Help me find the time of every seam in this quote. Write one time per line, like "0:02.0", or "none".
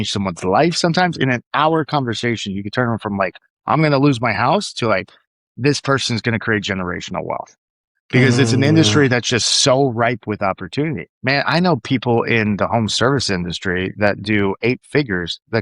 0:11.1